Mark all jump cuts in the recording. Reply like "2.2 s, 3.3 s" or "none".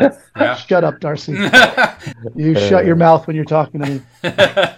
2.1 s

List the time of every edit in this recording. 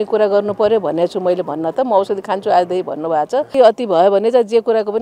3.5 s

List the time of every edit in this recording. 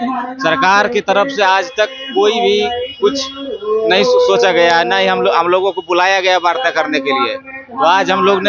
none

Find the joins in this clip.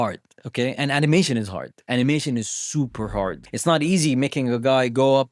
3.4 s

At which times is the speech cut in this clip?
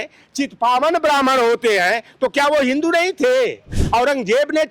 3.7 s

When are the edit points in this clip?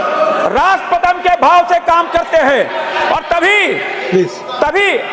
none

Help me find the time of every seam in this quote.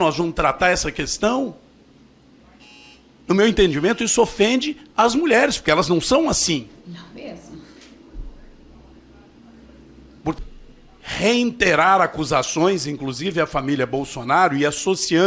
10.4 s

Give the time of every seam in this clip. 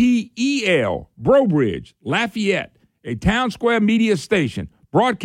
none

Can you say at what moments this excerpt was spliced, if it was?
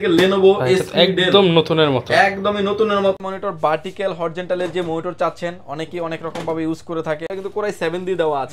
3.2 s, 7.3 s

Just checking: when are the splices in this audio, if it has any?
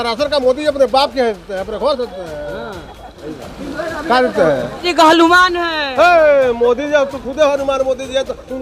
4.8 s

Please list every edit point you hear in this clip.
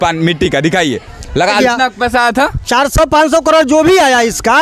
1.6 s

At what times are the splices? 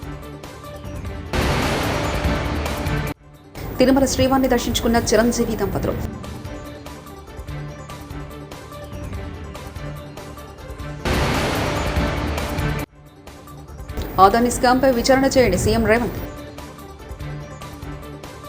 1.3 s

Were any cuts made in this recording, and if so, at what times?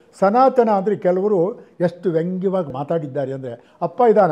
2.7 s

